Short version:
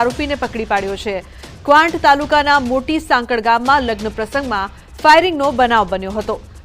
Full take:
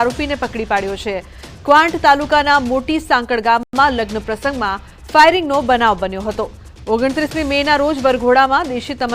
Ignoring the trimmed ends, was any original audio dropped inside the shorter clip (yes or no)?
yes